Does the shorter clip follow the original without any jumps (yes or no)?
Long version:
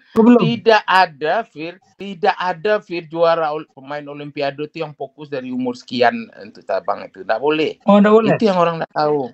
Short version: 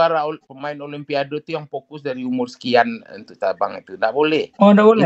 yes